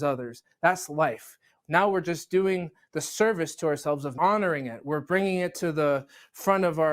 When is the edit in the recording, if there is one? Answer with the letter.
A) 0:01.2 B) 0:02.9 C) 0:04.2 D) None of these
C